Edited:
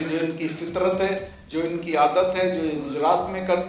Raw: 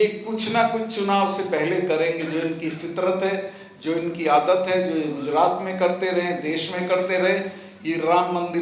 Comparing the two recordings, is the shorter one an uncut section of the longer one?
no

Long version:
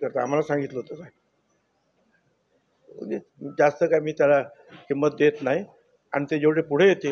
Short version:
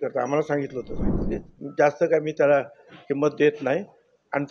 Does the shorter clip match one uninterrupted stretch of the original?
no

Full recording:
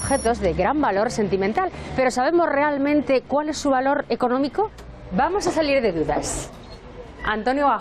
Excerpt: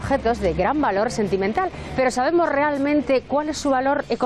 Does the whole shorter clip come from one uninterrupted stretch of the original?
yes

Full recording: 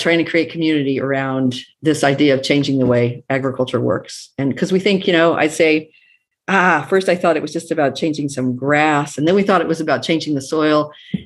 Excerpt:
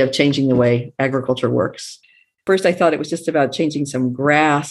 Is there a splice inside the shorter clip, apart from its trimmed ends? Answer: yes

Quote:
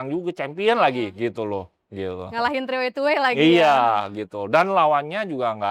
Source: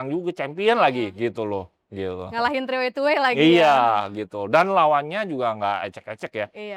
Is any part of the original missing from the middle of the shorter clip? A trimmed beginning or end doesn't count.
no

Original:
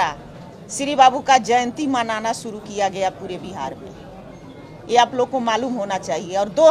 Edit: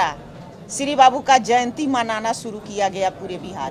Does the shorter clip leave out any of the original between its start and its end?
no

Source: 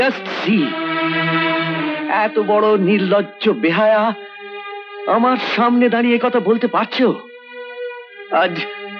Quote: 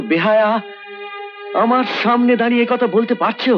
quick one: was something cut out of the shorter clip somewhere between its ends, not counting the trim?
no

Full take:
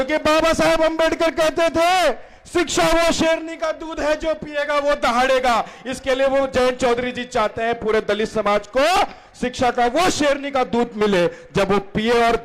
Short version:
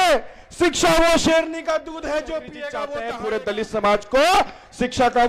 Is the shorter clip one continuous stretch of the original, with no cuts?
no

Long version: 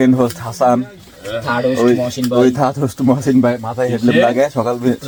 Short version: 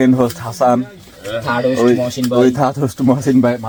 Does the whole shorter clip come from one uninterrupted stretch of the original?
yes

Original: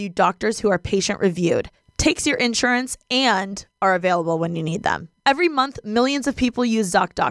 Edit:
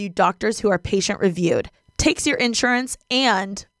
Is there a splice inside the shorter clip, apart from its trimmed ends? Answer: no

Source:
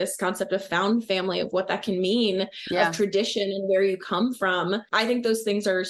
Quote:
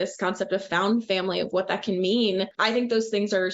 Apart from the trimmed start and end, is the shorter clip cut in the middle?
yes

